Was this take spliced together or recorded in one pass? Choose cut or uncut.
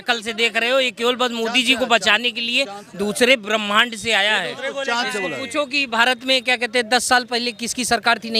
uncut